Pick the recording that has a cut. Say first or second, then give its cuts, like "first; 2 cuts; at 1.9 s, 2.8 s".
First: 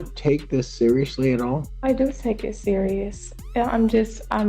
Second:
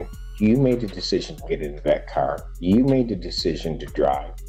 first; 1 cut; at 1.7 s